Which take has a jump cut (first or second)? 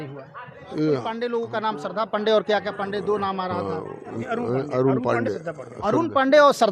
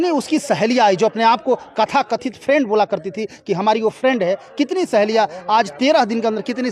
first